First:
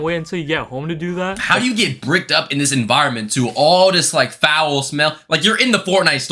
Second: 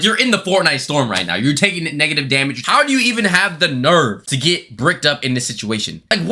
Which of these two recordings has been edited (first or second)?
second